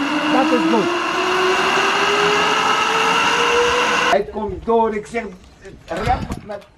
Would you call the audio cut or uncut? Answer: cut